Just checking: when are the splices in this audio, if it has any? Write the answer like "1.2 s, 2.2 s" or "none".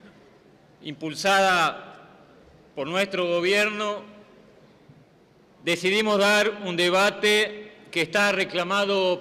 1.8 s